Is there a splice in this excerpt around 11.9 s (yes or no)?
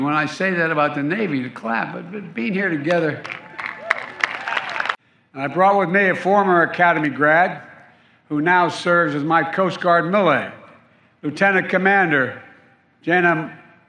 no